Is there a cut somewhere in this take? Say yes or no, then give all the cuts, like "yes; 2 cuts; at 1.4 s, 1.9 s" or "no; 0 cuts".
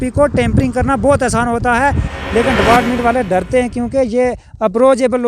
yes; 1 cut; at 2.1 s